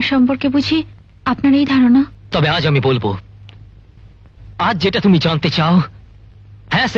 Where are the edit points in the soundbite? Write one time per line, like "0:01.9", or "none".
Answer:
0:02.2